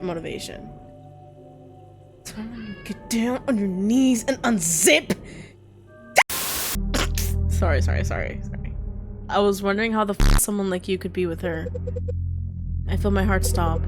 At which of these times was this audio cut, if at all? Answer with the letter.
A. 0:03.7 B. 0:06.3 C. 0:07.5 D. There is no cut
B